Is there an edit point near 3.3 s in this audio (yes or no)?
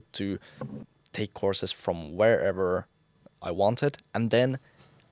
yes